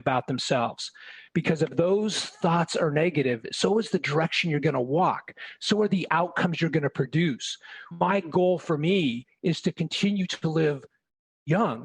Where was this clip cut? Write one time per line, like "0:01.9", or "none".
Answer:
0:08.1